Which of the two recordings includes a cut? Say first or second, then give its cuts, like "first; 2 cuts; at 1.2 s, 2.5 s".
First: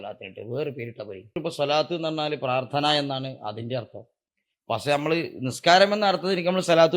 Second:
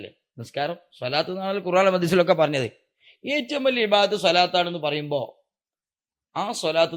first; 1 cut; at 1.4 s